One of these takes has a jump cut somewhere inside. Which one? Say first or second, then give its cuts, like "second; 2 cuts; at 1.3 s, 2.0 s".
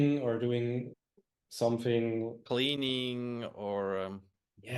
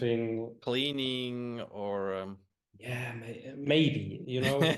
first; 1 cut; at 0.9 s